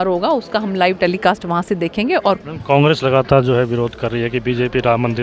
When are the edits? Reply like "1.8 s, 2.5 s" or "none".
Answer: 2.4 s